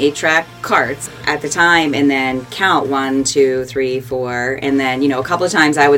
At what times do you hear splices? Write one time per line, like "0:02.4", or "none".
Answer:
0:01.0